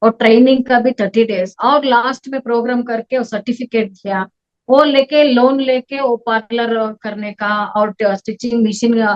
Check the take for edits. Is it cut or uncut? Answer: uncut